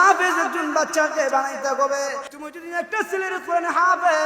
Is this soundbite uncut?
no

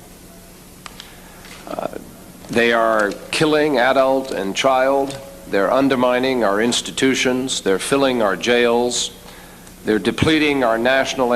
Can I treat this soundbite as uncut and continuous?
no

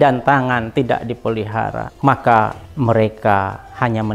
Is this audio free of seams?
no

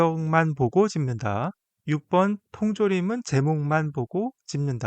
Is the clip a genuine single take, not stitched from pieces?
no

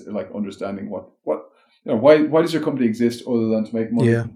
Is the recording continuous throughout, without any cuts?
yes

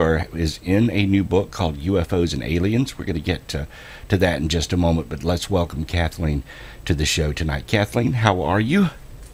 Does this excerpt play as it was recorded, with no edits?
no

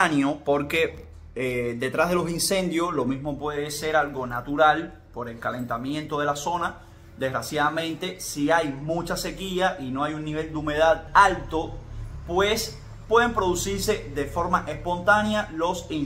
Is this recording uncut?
yes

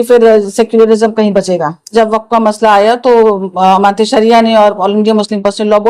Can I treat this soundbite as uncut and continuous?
no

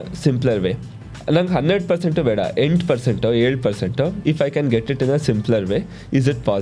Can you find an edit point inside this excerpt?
yes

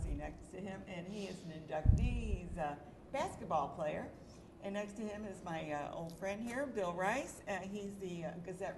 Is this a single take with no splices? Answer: no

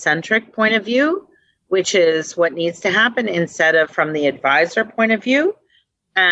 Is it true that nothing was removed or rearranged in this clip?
yes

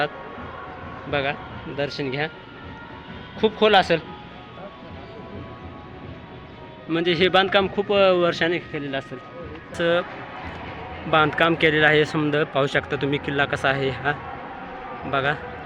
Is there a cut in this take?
yes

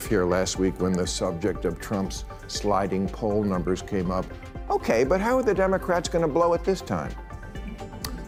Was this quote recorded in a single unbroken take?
yes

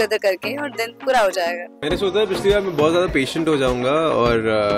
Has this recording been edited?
yes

